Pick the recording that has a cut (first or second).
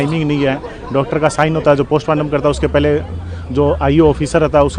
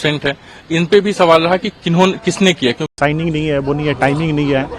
second